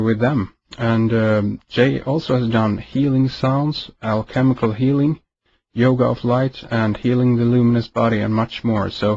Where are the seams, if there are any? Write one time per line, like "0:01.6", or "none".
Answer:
none